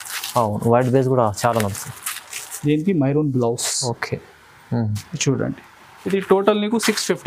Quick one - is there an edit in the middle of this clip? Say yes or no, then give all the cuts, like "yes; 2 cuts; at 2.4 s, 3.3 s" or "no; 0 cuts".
no; 0 cuts